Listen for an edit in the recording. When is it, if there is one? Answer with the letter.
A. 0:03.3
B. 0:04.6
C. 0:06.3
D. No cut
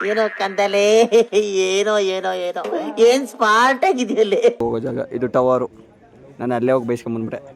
B